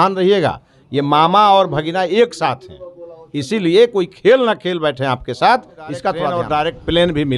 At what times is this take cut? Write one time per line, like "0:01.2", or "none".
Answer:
0:06.3